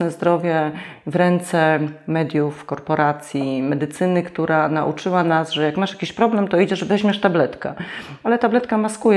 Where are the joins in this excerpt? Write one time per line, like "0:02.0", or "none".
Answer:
none